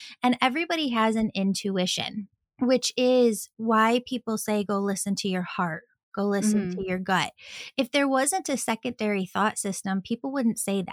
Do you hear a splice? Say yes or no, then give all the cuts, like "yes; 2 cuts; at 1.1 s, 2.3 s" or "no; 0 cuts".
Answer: no; 0 cuts